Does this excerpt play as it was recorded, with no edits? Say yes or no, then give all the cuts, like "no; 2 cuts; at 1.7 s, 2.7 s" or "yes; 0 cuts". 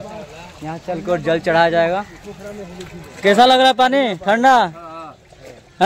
yes; 0 cuts